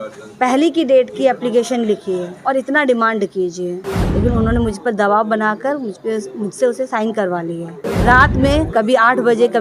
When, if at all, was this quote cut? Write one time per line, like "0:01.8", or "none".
0:03.8
0:07.9

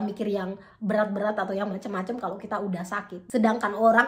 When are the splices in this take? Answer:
0:03.2

